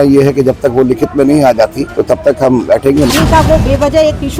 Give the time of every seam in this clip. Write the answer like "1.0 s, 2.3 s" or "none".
1.9 s, 3.1 s